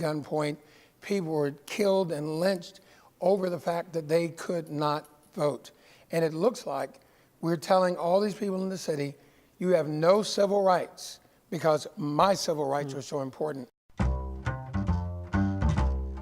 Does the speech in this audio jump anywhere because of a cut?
yes; 1 cut; at 13.8 s

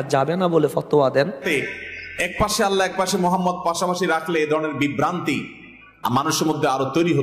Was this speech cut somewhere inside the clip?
yes; 1 cut; at 1.4 s

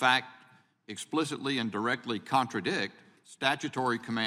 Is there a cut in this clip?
no; 0 cuts

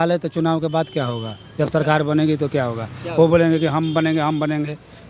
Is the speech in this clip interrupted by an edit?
no; 0 cuts

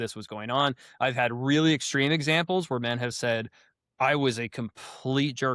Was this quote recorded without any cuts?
yes; 0 cuts

